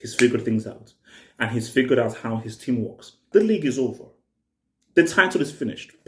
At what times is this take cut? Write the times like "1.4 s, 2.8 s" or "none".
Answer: 3.2 s

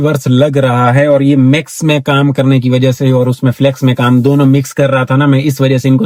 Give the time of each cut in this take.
none

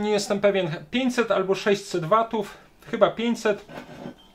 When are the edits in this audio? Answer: none

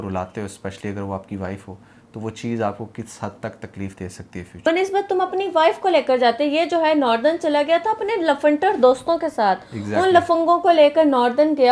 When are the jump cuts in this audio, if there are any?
4.5 s

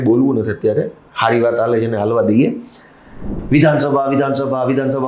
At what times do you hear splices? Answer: 3.3 s

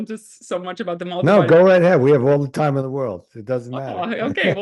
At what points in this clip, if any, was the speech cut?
none

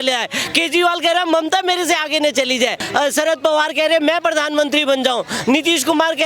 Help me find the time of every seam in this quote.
2.8 s

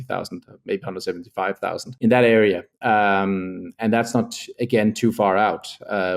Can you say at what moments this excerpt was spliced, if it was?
1.9 s

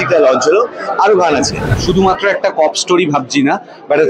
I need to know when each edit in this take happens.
1.7 s

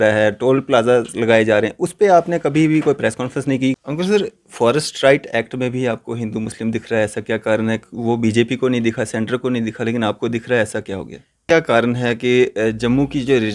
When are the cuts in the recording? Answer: 3.8 s, 11.4 s

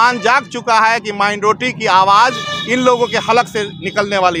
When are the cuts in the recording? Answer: none

